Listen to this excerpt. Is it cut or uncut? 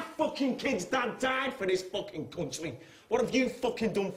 uncut